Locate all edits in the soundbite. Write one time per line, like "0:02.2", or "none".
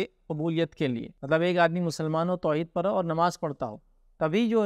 0:01.1